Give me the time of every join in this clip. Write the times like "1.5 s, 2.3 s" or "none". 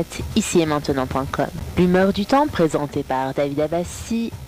1.6 s